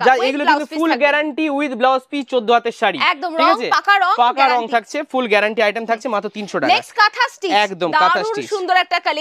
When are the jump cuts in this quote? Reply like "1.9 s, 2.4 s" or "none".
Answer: none